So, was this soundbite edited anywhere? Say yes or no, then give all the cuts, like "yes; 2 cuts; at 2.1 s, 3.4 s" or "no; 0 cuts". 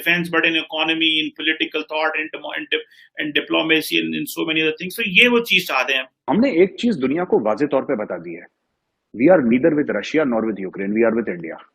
yes; 1 cut; at 6.2 s